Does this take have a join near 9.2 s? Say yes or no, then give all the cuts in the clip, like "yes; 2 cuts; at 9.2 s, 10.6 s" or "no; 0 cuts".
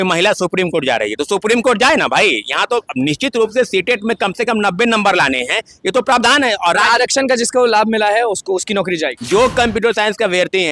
yes; 1 cut; at 9.2 s